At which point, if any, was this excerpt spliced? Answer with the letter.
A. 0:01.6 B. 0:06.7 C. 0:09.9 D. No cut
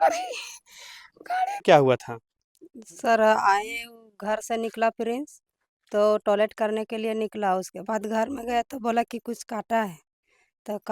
A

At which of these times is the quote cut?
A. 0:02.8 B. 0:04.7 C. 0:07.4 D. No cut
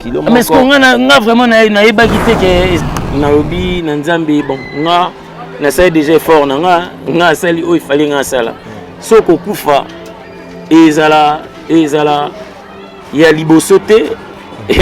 A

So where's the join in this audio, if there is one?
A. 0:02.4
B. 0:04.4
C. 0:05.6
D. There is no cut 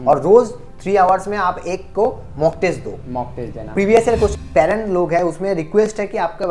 B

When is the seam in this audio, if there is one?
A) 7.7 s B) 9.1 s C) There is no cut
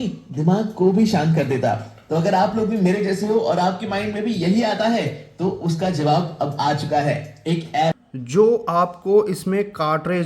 A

